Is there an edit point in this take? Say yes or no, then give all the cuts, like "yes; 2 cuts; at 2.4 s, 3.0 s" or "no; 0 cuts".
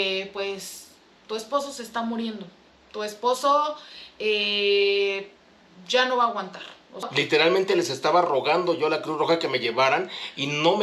yes; 1 cut; at 7.1 s